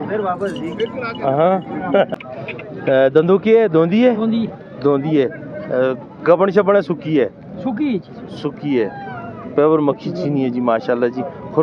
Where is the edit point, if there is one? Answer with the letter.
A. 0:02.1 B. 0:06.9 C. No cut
A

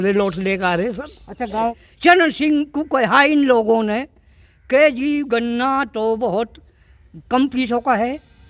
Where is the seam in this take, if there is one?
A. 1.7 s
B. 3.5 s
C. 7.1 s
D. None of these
A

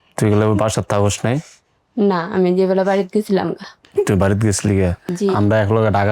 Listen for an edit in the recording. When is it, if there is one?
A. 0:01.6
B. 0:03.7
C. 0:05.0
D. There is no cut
C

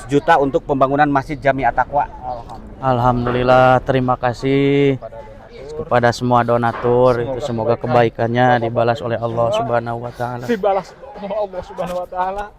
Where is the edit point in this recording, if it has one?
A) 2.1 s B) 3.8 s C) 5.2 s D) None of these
D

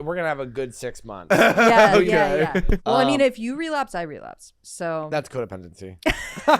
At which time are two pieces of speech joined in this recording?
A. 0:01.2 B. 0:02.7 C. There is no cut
B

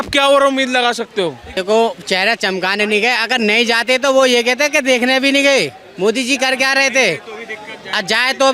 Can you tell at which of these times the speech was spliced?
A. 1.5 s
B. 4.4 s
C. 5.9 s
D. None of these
A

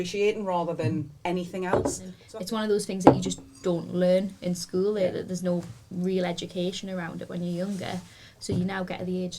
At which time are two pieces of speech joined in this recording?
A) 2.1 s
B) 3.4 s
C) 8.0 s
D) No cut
A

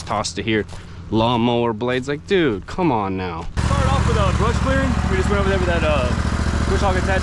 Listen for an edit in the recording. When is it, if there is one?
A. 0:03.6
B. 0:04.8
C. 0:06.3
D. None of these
A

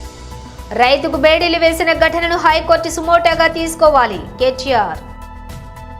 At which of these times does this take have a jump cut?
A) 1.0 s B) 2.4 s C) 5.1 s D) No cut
C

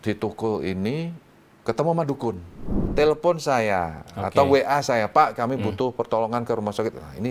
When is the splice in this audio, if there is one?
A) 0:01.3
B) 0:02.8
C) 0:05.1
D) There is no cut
B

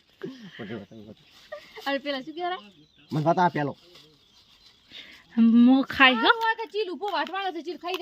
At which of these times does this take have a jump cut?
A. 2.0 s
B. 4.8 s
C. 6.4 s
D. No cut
C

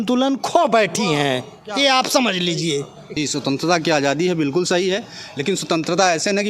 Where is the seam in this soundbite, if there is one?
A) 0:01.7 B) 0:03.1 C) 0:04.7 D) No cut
B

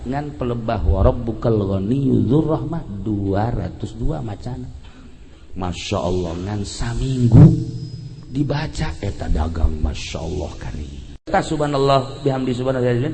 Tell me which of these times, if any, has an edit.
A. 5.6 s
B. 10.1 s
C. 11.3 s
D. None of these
C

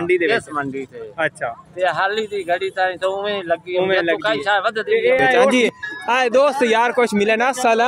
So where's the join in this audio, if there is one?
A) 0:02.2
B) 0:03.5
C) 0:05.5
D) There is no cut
C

